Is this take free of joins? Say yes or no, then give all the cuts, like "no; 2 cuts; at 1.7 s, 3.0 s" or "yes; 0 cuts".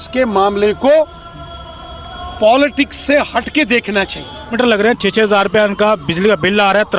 no; 1 cut; at 4.6 s